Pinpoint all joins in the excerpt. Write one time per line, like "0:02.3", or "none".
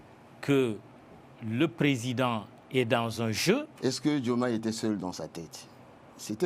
0:03.7